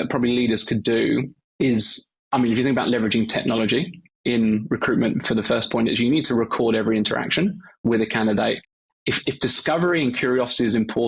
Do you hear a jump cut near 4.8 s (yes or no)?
no